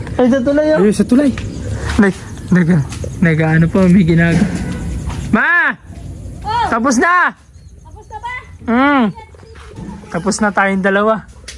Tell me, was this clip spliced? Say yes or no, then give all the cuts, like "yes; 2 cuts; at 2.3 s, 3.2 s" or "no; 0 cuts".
no; 0 cuts